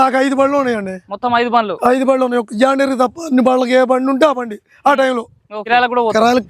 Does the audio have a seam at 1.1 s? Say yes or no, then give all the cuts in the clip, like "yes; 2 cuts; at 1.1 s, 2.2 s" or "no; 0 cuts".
no; 1 cut; at 5.5 s